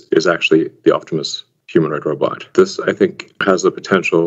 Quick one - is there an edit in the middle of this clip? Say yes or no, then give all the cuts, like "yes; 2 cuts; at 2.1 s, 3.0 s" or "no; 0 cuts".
no; 0 cuts